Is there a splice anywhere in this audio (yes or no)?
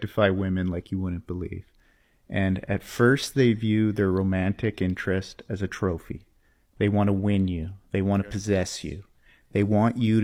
no